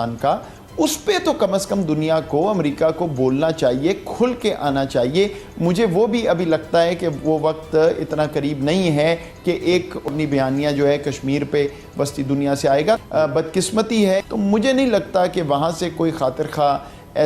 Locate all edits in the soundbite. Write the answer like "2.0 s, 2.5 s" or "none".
10.1 s, 13.0 s, 14.3 s